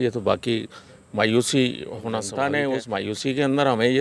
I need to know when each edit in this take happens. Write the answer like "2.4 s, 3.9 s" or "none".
2.3 s